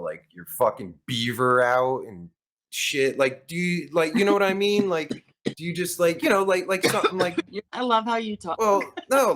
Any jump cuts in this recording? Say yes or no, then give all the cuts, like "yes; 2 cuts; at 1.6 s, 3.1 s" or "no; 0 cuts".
yes; 1 cut; at 7.7 s